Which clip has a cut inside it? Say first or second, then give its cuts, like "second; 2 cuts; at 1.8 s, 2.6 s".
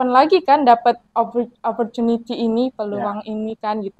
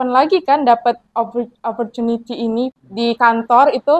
second; 1 cut; at 2.8 s